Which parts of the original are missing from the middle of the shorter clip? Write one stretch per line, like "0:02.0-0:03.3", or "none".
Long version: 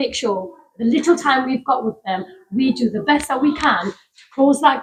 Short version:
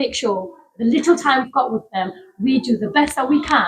0:01.5-0:01.6